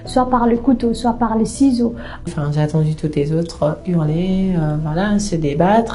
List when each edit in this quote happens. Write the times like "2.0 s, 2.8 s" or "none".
2.3 s